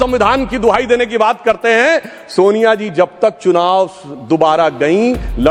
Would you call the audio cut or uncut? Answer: uncut